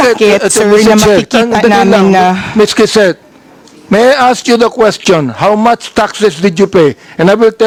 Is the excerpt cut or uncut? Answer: uncut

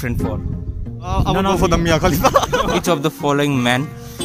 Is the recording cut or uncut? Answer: cut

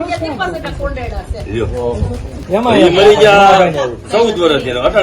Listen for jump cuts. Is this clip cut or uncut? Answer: cut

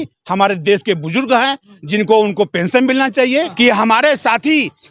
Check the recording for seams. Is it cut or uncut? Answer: cut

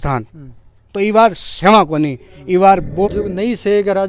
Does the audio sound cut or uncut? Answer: cut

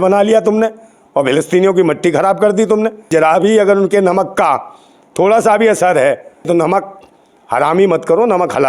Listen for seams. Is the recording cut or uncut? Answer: cut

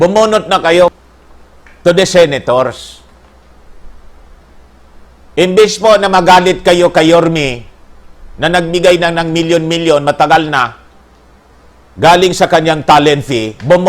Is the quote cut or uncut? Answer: cut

